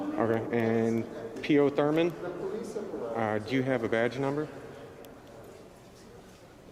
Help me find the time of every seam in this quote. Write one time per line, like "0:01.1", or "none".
none